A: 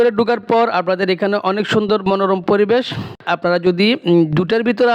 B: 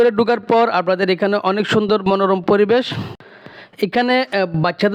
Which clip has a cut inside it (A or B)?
A